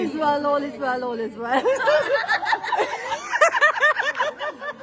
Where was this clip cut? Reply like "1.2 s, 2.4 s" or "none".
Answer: none